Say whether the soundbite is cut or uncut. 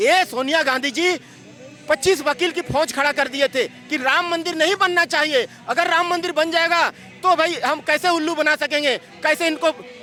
uncut